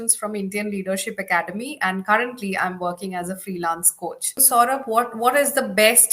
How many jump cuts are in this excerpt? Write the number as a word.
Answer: one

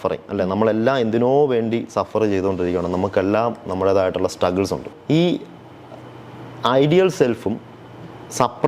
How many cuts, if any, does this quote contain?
one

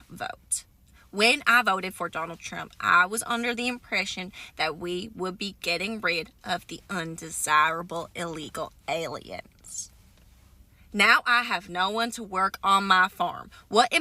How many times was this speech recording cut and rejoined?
zero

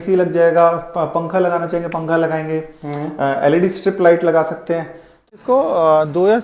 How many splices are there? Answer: one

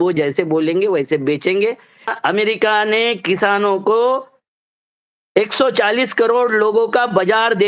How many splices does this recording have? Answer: one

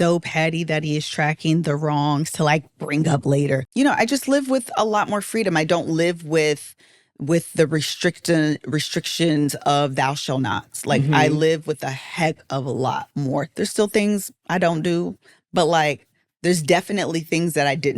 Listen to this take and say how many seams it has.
one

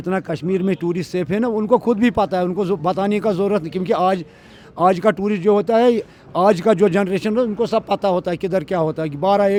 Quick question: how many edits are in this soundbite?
zero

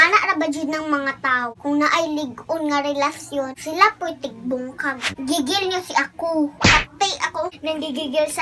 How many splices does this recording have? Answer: one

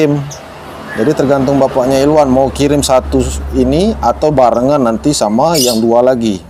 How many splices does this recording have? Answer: zero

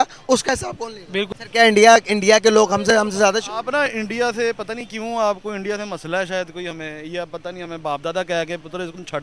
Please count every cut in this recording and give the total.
one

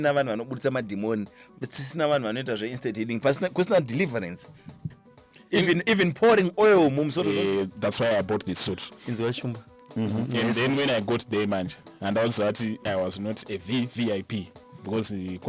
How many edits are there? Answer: one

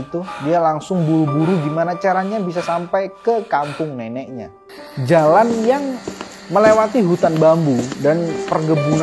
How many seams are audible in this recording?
one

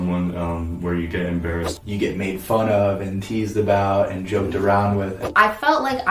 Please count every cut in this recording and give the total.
two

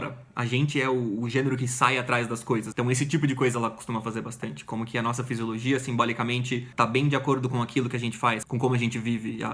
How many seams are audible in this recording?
three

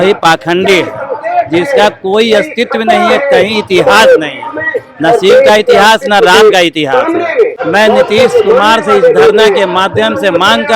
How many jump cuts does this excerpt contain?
one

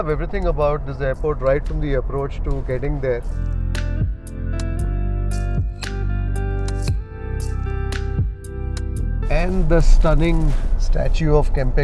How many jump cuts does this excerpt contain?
zero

